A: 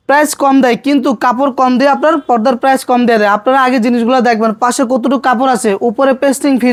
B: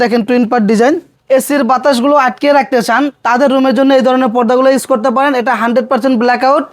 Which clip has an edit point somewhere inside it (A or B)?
B